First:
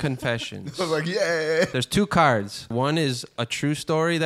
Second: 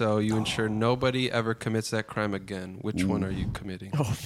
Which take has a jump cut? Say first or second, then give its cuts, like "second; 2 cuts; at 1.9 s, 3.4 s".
first; 2 cuts; at 1.7 s, 2.7 s